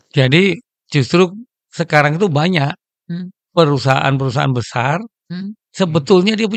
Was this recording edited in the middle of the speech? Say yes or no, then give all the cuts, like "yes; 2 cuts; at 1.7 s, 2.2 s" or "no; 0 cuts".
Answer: no; 0 cuts